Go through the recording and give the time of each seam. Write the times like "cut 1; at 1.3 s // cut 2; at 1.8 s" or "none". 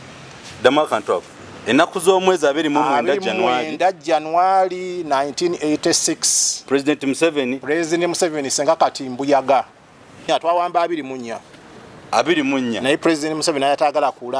cut 1; at 10.2 s

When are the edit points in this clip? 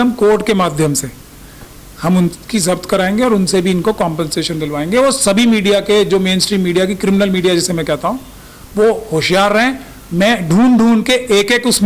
none

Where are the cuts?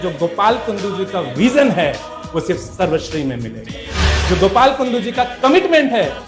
none

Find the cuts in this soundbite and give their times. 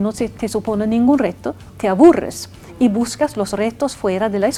none

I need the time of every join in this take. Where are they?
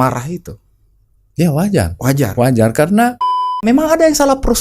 cut 1; at 3.6 s

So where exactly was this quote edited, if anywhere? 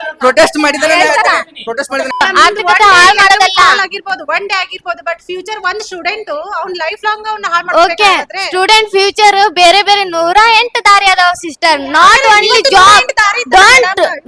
cut 1; at 2.2 s

